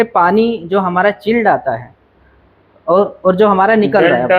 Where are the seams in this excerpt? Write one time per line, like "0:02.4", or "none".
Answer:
none